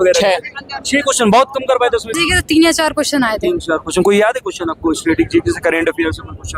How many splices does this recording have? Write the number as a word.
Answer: one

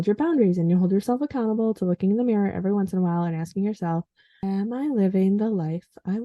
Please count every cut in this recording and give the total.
one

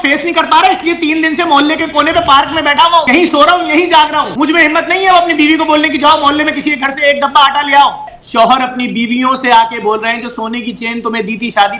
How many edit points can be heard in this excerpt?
three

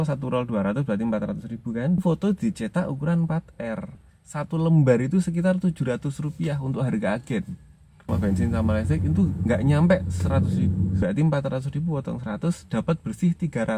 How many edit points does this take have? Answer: four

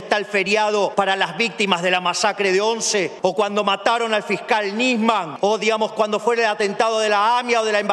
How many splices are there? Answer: three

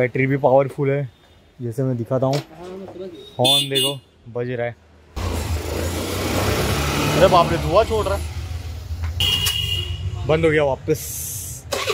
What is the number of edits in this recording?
one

